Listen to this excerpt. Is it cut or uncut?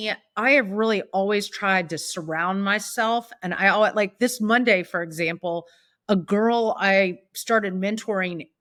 uncut